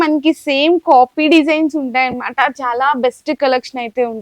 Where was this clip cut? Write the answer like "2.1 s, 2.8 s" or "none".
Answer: none